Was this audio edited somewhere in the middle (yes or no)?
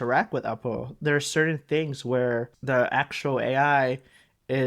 yes